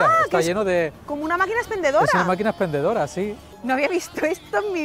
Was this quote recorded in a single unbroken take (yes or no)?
no